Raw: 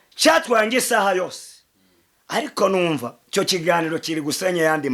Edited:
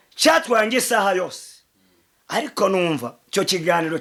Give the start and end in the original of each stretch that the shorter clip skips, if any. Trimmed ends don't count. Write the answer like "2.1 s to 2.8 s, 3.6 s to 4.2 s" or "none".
none